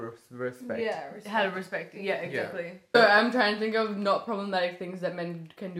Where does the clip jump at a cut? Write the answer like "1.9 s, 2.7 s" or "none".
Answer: 3.0 s